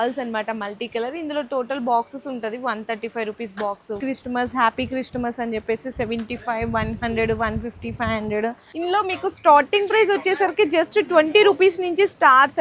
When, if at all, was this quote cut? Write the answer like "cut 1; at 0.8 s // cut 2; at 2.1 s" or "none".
cut 1; at 4.0 s // cut 2; at 8.7 s